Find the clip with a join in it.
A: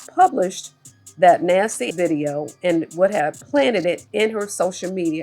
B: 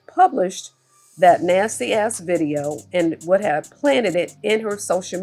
A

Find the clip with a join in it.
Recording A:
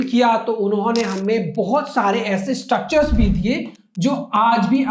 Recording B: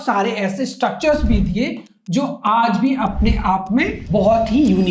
B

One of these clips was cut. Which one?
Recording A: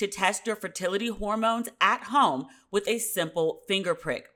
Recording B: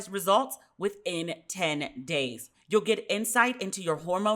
B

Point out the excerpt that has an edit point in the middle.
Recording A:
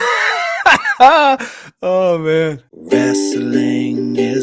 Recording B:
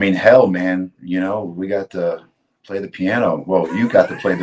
A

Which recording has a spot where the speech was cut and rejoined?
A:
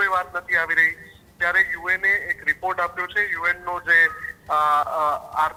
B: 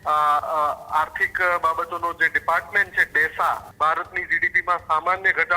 B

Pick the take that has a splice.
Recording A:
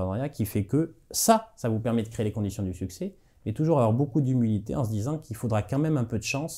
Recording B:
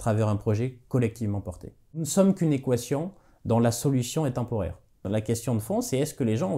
B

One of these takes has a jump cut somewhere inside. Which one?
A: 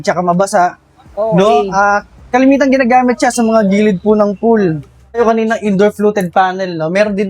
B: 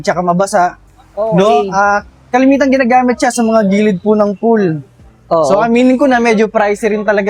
A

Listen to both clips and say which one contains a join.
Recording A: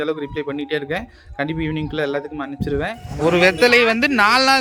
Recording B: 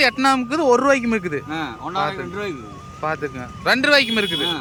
A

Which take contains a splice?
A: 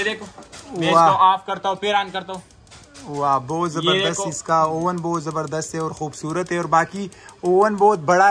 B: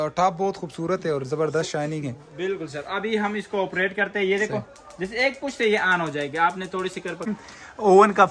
B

